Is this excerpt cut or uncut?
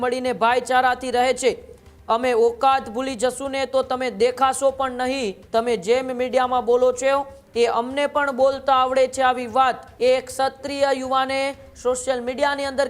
cut